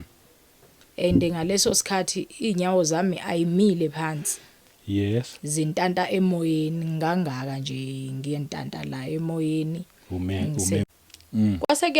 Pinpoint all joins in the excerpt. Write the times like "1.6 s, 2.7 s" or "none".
10.9 s